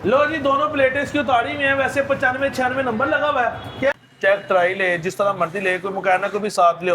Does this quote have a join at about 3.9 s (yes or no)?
yes